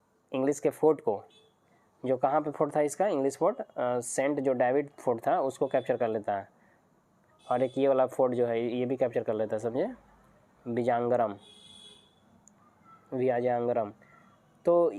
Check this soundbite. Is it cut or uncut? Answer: uncut